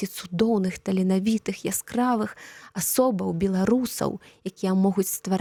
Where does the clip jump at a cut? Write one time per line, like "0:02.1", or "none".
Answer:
none